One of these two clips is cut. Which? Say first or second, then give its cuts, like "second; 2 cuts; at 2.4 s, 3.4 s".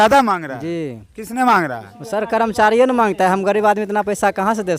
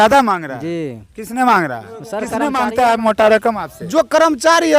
second; 1 cut; at 2.4 s